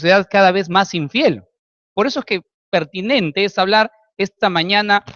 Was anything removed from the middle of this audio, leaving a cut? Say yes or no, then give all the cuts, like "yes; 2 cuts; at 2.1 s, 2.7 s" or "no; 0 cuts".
no; 0 cuts